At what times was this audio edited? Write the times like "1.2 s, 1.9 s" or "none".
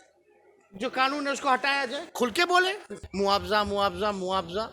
3.0 s